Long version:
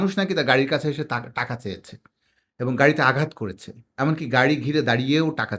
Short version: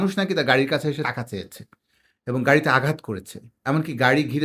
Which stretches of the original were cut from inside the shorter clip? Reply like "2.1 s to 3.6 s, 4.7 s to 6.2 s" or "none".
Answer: 1.1 s to 1.4 s